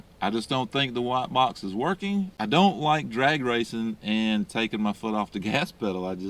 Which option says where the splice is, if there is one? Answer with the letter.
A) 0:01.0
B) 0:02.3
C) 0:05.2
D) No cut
B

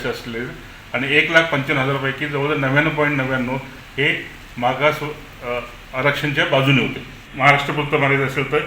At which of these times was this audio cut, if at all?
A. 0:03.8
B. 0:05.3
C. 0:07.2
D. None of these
C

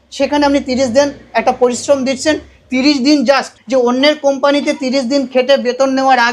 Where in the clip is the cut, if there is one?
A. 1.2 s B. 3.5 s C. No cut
B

